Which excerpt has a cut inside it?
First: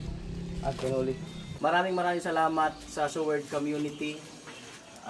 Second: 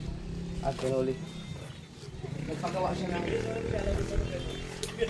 first; 1 cut; at 1.4 s

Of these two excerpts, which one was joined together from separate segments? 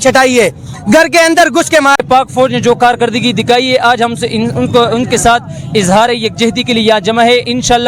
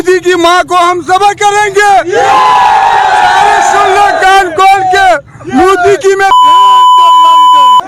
first; 1 cut; at 2.0 s

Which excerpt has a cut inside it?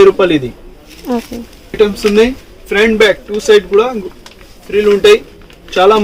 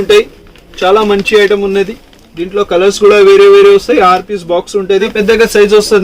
second; 1 cut; at 5.1 s

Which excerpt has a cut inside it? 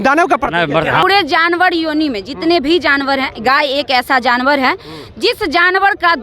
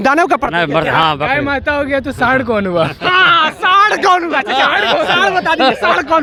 first; 1 cut; at 1.0 s

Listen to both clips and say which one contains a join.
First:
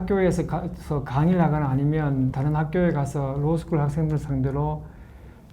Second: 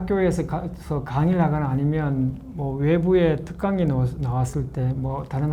first; 1 cut; at 2.4 s

